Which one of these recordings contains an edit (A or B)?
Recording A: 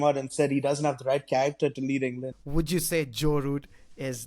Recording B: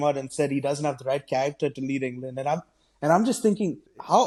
A